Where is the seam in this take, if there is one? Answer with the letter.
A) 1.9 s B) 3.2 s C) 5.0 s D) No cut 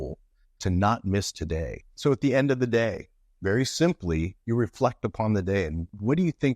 A